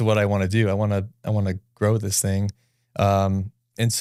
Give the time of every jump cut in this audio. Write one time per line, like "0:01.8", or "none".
none